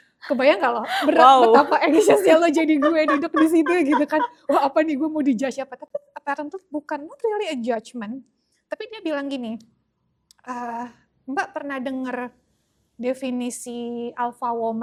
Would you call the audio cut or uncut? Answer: uncut